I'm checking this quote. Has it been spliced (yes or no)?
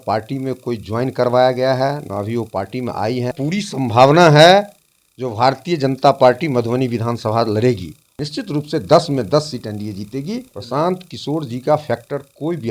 yes